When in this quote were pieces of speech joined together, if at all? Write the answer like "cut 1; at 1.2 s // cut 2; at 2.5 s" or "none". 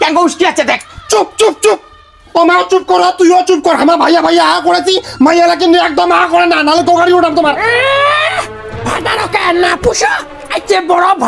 none